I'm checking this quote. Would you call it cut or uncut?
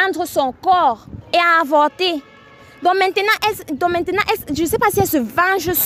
cut